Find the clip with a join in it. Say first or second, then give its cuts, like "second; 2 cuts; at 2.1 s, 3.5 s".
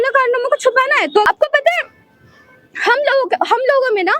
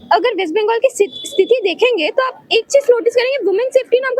first; 1 cut; at 1.3 s